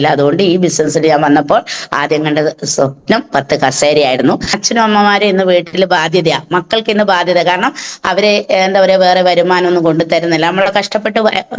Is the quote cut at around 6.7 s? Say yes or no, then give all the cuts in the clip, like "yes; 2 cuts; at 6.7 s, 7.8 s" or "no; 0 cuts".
no; 1 cut; at 4.6 s